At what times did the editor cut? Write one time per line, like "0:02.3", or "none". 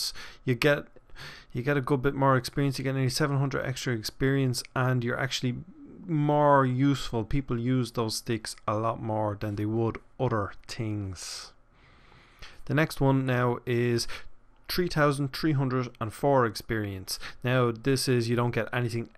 0:13.9

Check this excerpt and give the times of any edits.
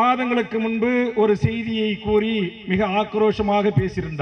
none

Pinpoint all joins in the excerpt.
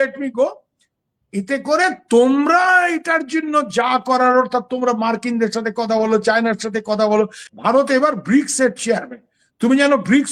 0:07.4

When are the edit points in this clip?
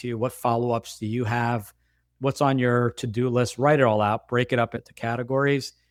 none

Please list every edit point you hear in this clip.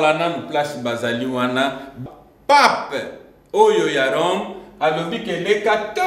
0:02.0

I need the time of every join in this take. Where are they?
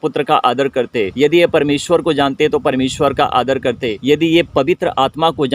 0:01.1
0:03.9

